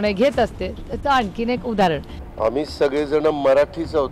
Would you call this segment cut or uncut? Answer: cut